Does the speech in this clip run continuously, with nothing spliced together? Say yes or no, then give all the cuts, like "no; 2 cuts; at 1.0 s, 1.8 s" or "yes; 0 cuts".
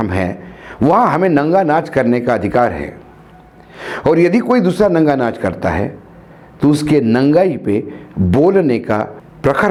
yes; 0 cuts